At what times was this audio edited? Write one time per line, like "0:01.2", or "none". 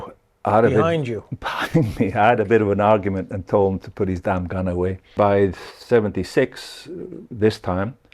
0:05.1